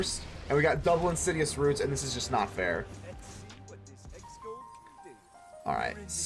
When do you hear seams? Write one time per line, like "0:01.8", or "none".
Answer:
none